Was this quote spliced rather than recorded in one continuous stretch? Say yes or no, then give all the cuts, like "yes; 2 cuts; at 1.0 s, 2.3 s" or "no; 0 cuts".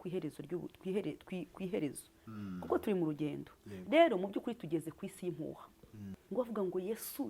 yes; 1 cut; at 6.2 s